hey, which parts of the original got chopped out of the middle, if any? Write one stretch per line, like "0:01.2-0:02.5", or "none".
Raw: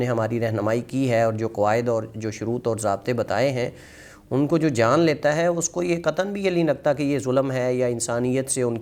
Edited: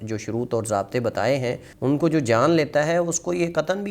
0:03.8-0:04.2